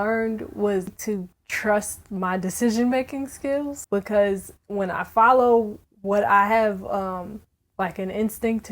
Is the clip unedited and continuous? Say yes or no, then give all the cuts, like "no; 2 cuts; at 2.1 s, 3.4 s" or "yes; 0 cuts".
no; 2 cuts; at 0.9 s, 3.8 s